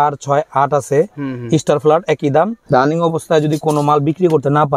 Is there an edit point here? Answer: yes; 1 cut; at 2.6 s

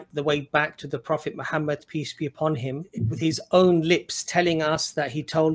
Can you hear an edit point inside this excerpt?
yes; 1 cut; at 3.0 s

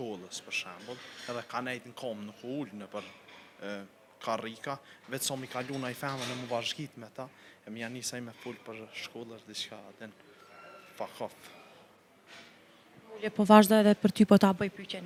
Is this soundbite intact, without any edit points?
yes; 0 cuts

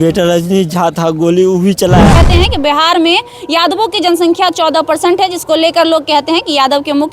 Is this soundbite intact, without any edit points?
no; 1 cut; at 2.2 s

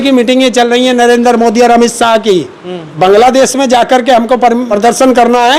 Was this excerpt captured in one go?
no; 2 cuts; at 2.8 s, 4.7 s

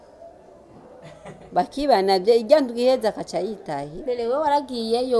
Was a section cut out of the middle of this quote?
no; 0 cuts

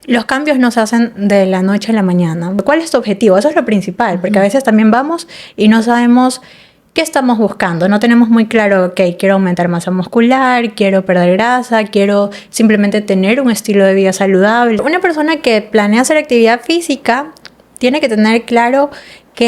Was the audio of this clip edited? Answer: yes; 2 cuts; at 2.6 s, 14.8 s

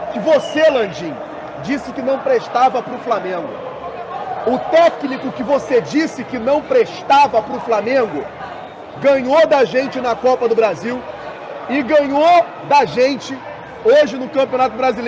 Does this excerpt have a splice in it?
no; 0 cuts

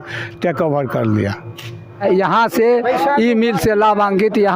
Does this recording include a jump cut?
yes; 1 cut; at 2.0 s

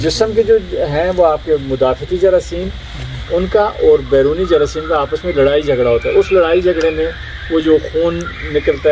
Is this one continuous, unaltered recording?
yes; 0 cuts

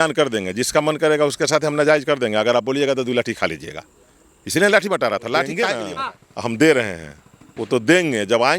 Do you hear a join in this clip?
yes; 1 cut; at 5.8 s

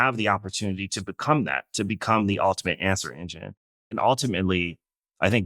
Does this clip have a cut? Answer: yes; 1 cut; at 3.9 s

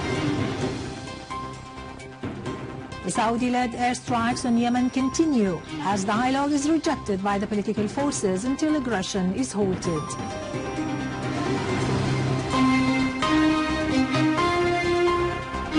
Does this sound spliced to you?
no; 0 cuts

